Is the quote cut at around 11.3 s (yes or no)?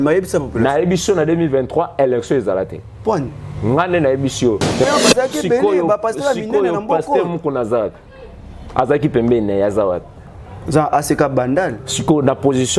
no